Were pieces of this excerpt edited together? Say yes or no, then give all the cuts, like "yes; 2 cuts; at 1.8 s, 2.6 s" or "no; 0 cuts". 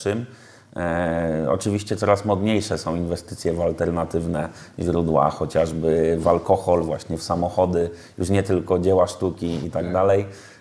no; 0 cuts